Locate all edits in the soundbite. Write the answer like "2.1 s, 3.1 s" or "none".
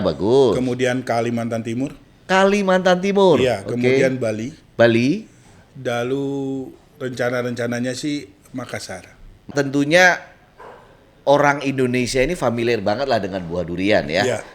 9.5 s